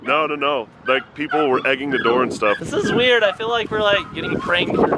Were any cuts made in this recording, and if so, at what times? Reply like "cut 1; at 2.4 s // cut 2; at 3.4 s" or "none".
cut 1; at 2.6 s